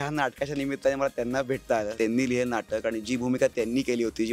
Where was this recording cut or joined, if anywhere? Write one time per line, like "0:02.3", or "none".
0:01.9